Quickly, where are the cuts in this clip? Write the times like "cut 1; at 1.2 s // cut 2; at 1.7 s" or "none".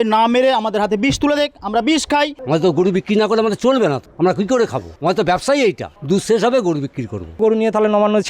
cut 1; at 2.4 s // cut 2; at 4.1 s // cut 3; at 4.9 s // cut 4; at 5.9 s // cut 5; at 7.4 s

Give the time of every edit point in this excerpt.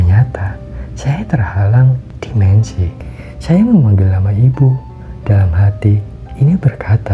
cut 1; at 3.0 s

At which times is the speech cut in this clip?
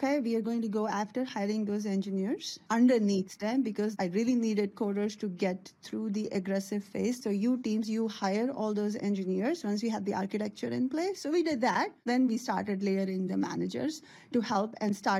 cut 1; at 2.5 s // cut 2; at 3.9 s // cut 3; at 7.2 s // cut 4; at 12.1 s

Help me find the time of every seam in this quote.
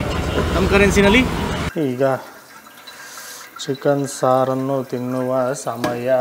cut 1; at 1.6 s

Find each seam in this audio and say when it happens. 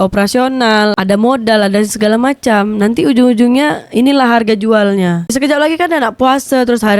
cut 1; at 5.3 s

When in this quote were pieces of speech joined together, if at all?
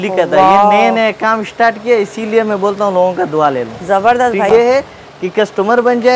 cut 1; at 4.5 s

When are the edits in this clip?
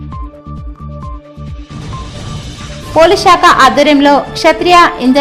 cut 1; at 1.9 s

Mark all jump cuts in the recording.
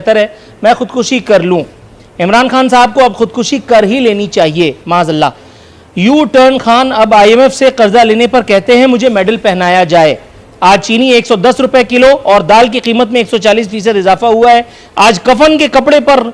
none

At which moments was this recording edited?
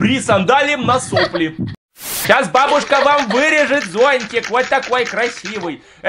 cut 1; at 2.0 s

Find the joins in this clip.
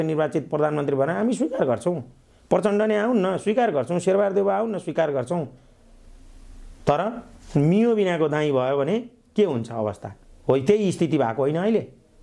none

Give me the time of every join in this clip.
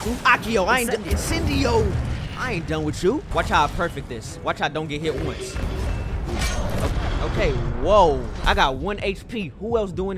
cut 1; at 3.3 s // cut 2; at 5.6 s // cut 3; at 8.3 s

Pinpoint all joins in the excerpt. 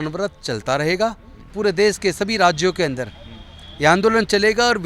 cut 1; at 1.5 s

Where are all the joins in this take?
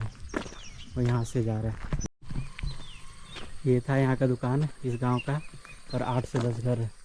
cut 1; at 2.2 s

